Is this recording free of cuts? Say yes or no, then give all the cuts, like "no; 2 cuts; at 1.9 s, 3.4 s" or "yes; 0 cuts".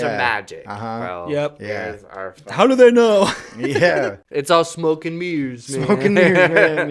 no; 1 cut; at 4.2 s